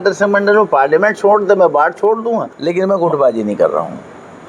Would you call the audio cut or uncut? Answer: cut